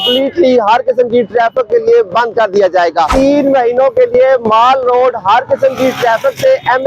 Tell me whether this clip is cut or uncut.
cut